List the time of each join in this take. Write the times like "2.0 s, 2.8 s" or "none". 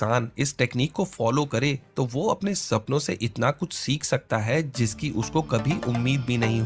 none